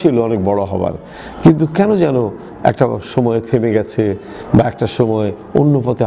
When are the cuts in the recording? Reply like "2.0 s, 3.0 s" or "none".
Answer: none